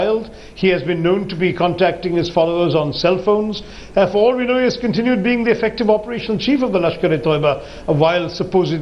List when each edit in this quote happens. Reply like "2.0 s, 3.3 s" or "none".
5.7 s

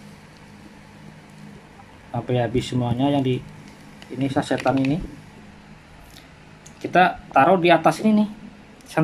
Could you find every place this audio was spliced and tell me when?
5.3 s

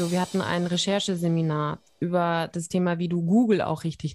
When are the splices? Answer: none

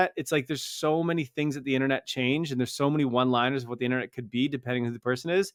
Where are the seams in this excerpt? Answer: none

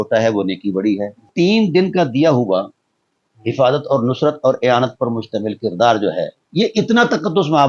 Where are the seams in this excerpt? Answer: 1.3 s, 6.4 s

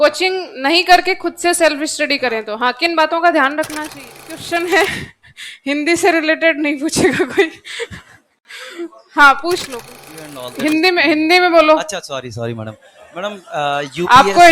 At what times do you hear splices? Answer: 4.3 s, 9.9 s

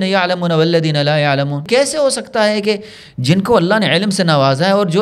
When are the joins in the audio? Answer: 1.6 s

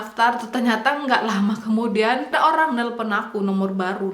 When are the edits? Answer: 2.3 s

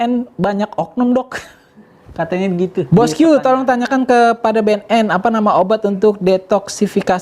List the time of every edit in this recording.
2.9 s

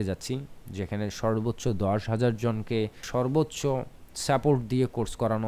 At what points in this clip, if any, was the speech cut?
3.0 s

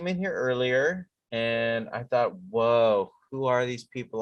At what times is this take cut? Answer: 1.1 s

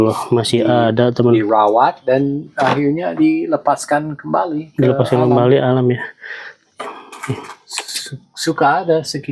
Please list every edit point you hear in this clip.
none

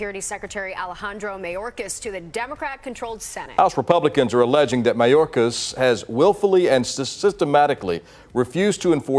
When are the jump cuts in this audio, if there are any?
3.4 s

